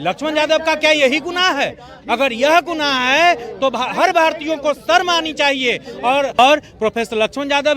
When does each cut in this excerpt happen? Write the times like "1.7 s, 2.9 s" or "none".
6.4 s